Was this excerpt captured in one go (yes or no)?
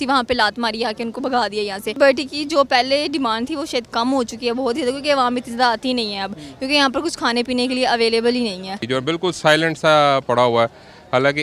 no